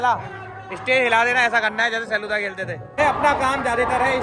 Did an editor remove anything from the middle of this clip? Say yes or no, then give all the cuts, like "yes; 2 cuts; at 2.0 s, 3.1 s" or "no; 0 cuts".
yes; 1 cut; at 3.0 s